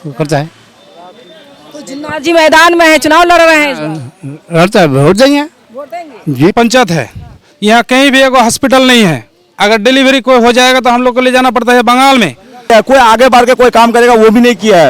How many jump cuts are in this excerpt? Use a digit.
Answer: 2